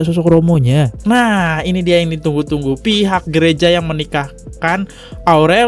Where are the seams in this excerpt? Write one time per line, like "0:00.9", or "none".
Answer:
0:00.9